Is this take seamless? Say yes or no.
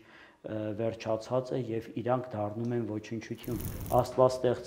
no